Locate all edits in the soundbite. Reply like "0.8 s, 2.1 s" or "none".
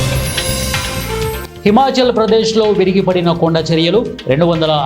1.5 s